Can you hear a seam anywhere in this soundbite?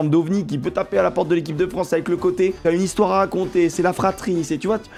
no; 0 cuts

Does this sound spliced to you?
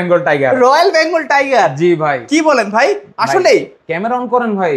no; 0 cuts

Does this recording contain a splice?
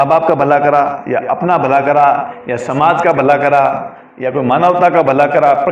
no; 0 cuts

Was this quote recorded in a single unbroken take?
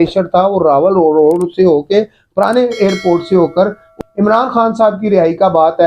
no; 1 cut; at 3.9 s

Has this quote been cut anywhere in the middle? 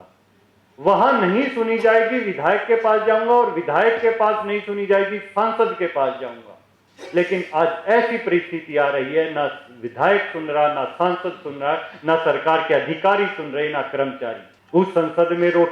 yes; 1 cut; at 14.5 s

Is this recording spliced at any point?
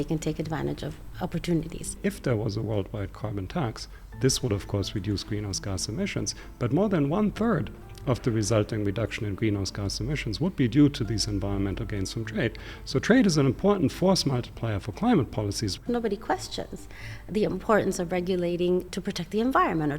yes; 3 cuts; at 2.0 s, 15.8 s, 18.9 s

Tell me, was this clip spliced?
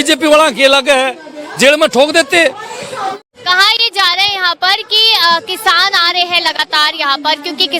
yes; 1 cut; at 3.2 s

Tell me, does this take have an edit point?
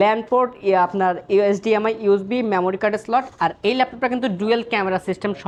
no; 0 cuts

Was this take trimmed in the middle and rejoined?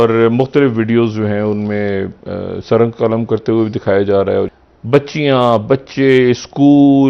yes; 1 cut; at 4.5 s

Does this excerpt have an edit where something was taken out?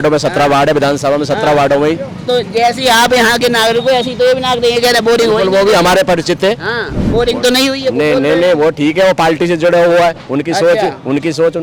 no; 0 cuts

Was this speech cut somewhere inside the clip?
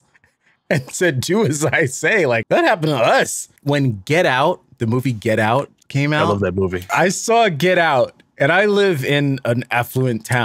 yes; 3 cuts; at 2.4 s, 3.5 s, 6.9 s

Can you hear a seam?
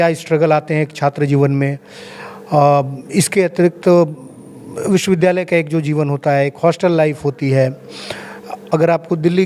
no; 0 cuts

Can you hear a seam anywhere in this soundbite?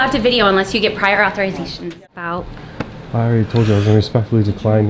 yes; 1 cut; at 2.0 s

